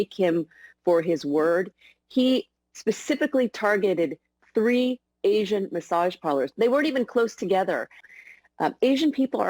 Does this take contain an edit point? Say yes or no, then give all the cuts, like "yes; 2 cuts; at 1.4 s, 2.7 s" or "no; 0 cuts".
yes; 1 cut; at 8.0 s